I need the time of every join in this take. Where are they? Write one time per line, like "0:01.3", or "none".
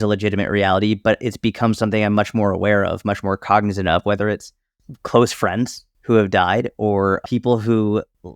0:07.2